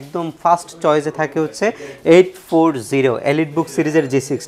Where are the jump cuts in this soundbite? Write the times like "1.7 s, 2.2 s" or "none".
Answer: none